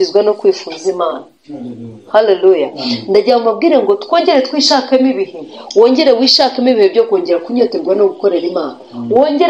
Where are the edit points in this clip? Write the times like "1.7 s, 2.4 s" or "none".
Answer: none